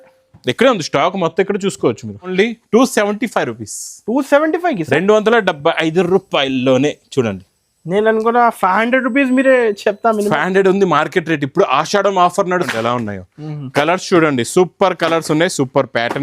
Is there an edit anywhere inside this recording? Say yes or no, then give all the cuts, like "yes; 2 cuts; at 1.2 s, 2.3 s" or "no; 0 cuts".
yes; 2 cuts; at 2.3 s, 12.7 s